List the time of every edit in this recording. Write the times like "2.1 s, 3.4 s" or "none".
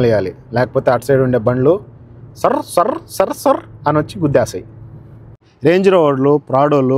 5.4 s